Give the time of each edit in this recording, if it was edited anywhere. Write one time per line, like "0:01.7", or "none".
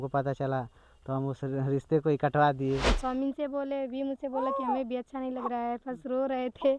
0:02.9